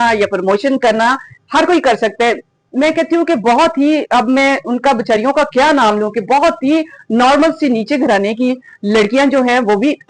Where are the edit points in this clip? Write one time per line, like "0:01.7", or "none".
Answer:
none